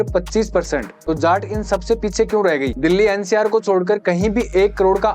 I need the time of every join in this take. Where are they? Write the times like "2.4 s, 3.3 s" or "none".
0.9 s, 2.7 s